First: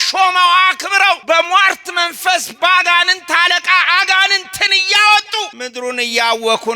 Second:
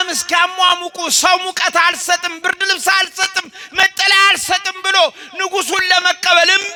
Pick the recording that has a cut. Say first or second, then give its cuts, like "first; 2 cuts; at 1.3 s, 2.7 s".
first; 2 cuts; at 1.2 s, 5.5 s